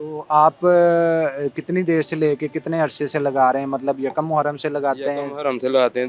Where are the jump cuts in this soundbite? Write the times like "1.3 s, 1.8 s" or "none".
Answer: none